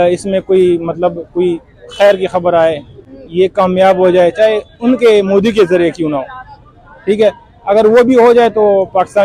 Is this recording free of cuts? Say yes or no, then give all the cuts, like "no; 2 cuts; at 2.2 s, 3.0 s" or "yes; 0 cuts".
yes; 0 cuts